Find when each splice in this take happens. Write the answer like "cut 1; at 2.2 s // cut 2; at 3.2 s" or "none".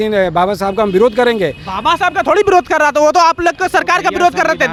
none

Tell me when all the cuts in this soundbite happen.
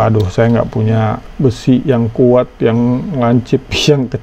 none

